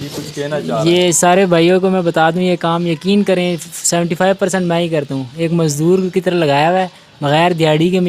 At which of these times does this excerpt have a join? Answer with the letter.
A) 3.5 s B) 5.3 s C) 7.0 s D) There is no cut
D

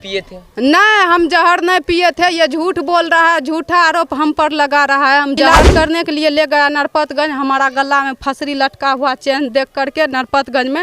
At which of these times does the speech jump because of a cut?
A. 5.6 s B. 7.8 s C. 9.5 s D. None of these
A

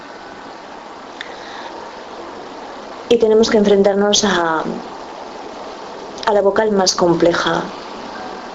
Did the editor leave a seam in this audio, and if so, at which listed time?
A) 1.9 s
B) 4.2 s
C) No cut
B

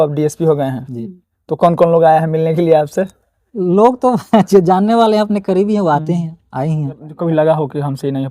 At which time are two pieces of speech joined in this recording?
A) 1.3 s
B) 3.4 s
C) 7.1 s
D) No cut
C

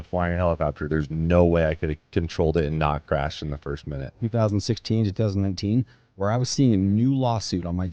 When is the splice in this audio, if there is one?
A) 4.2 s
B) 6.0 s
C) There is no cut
A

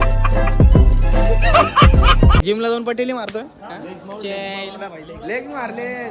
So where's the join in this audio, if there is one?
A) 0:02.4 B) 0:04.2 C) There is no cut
A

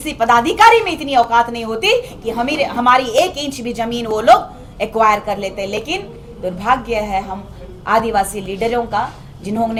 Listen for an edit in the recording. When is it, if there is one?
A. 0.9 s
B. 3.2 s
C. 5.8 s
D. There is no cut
D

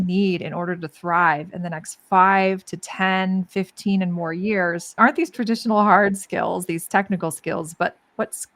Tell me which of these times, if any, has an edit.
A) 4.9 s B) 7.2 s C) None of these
A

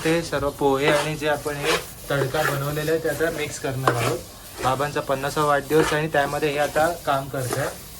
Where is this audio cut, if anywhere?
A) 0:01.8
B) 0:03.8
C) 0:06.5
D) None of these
D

